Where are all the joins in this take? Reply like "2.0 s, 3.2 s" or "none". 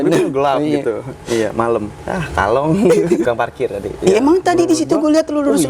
3.2 s